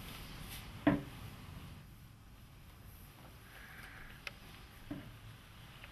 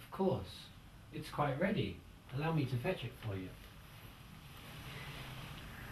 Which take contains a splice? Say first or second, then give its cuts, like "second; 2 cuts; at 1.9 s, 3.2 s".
first; 1 cut; at 2.1 s